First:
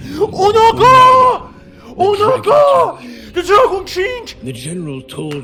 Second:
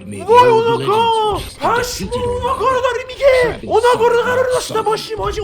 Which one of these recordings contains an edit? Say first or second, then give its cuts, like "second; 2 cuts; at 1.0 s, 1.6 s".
second; 2 cuts; at 1.5 s, 3.6 s